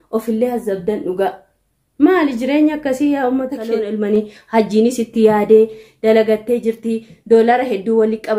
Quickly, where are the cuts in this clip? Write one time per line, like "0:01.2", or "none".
0:03.7